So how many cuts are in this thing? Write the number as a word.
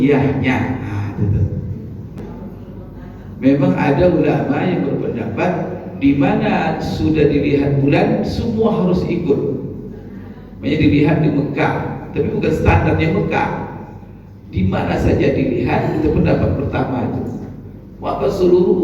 one